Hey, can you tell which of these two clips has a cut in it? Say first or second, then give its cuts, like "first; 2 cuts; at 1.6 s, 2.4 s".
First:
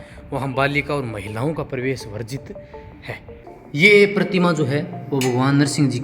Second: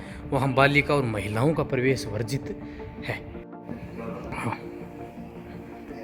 first; 1 cut; at 3.7 s